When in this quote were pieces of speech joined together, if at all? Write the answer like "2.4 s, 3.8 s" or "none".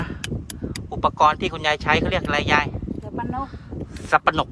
none

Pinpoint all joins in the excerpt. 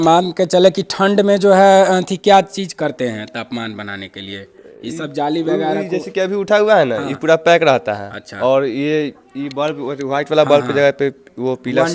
none

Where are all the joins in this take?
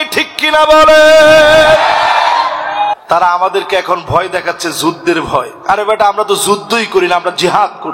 2.9 s

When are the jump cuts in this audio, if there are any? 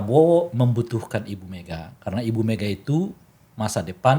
none

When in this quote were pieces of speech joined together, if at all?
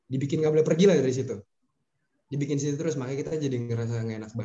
none

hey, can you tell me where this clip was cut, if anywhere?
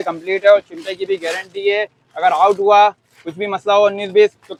none

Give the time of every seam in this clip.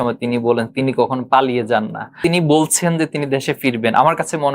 2.2 s

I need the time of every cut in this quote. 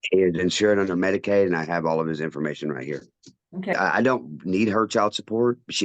3.7 s

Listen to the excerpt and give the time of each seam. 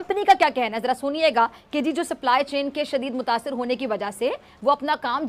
none

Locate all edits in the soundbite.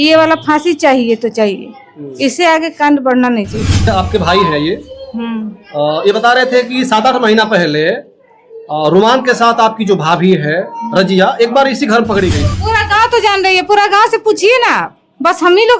3.9 s, 12.5 s

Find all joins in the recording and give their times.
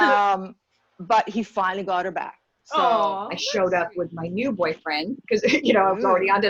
3.3 s

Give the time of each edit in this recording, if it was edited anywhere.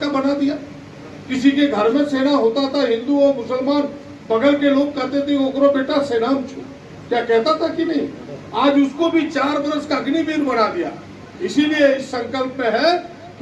none

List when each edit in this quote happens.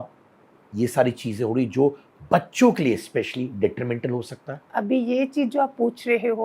none

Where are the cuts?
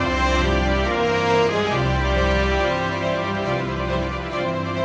none

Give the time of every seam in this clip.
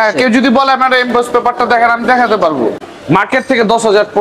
2.8 s

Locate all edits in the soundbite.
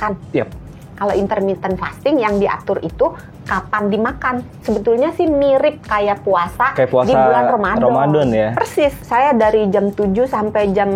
4.6 s, 9.0 s

